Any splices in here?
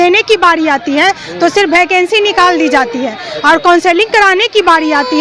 no; 0 cuts

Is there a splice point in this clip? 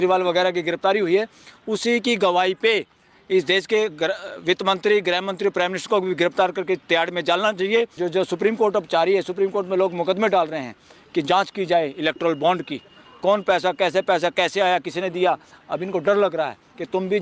yes; 2 cuts; at 8.0 s, 15.5 s

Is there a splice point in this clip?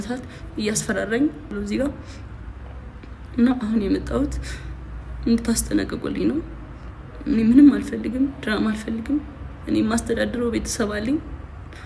yes; 1 cut; at 1.5 s

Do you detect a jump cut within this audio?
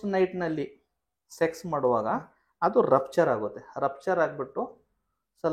no; 0 cuts

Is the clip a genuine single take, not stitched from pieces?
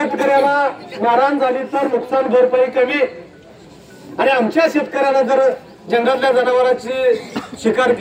yes; 0 cuts

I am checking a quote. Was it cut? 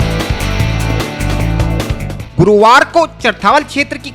yes; 1 cut; at 2.1 s

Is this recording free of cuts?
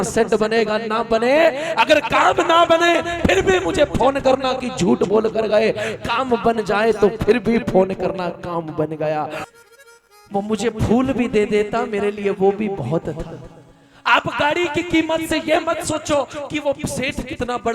no; 1 cut; at 9.4 s

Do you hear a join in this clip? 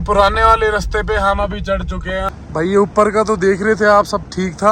yes; 1 cut; at 2.3 s

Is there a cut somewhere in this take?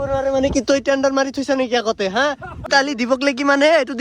yes; 1 cut; at 2.6 s

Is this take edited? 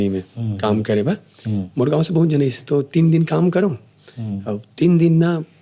no; 0 cuts

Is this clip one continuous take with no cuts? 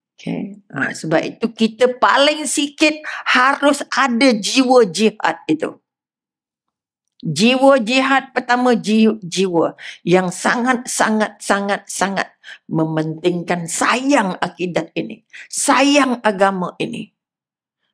yes; 0 cuts

